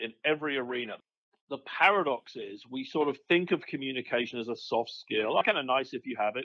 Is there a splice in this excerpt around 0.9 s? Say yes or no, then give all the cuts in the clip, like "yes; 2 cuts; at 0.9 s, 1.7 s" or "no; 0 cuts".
yes; 2 cuts; at 0.9 s, 5.4 s